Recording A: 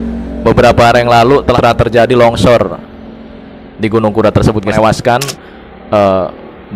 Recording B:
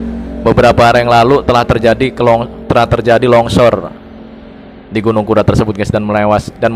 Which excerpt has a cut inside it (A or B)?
A